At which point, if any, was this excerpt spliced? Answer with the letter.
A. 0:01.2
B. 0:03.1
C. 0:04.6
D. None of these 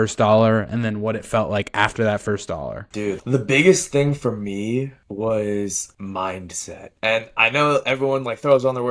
B